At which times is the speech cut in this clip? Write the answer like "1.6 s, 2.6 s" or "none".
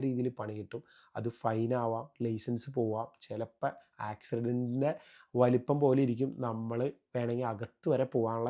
none